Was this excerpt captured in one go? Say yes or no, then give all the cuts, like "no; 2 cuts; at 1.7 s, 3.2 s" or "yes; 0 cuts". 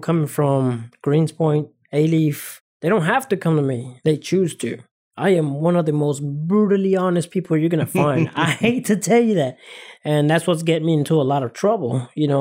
no; 5 cuts; at 0.9 s, 1.8 s, 2.7 s, 3.9 s, 4.9 s